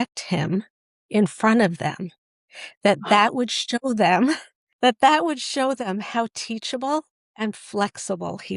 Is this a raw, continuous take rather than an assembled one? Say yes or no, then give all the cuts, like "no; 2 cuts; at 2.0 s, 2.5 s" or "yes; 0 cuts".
yes; 0 cuts